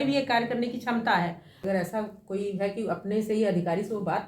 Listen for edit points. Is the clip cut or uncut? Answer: cut